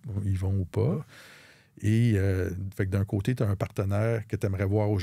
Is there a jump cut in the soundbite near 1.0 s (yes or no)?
yes